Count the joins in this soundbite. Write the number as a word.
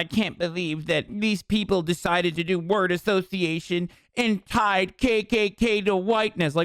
one